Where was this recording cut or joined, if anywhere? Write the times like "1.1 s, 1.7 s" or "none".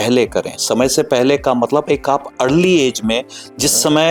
none